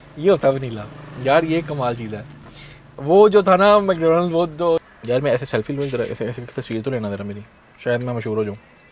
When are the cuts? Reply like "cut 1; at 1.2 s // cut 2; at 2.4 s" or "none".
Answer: cut 1; at 4.9 s